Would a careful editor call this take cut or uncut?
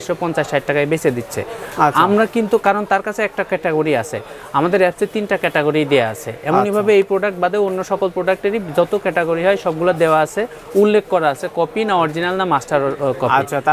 uncut